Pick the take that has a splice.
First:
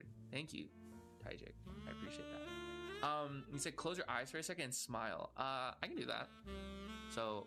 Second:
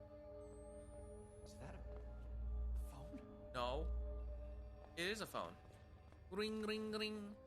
second; 1 cut; at 0.9 s

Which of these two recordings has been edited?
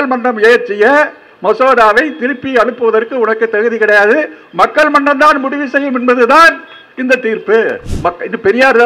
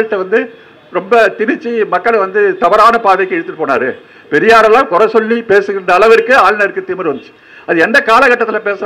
first; 1 cut; at 7.9 s

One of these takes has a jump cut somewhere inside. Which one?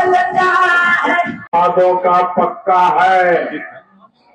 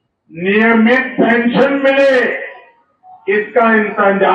first; 1 cut; at 1.5 s

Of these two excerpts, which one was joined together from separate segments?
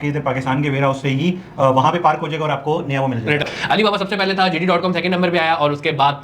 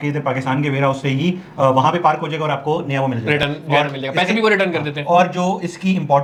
first; 1 cut; at 3.5 s

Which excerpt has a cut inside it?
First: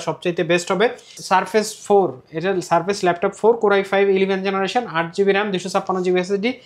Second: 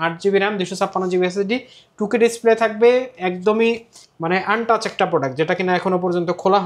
first; 1 cut; at 1.2 s

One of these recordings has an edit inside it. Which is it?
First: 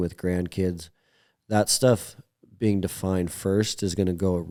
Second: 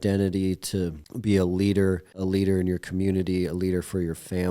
second; 2 cuts; at 1.1 s, 2.1 s

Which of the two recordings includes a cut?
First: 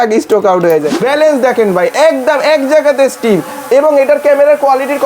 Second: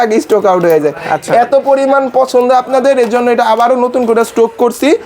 first; 1 cut; at 0.9 s

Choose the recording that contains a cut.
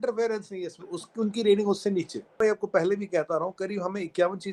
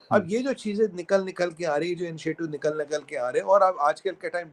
first; 1 cut; at 2.4 s

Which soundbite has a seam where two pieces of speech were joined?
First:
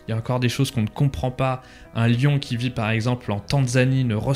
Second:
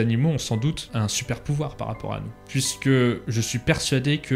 second; 3 cuts; at 0.8 s, 2.4 s, 3.2 s

